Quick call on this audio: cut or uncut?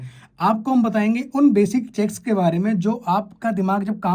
uncut